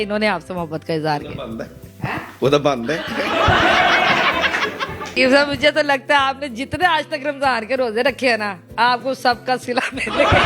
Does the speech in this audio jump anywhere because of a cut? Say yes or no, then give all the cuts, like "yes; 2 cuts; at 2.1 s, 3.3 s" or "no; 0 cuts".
yes; 1 cut; at 5.2 s